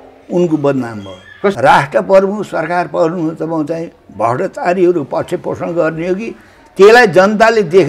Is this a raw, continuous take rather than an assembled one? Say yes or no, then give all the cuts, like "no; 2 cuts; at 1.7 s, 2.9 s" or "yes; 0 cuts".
no; 1 cut; at 1.6 s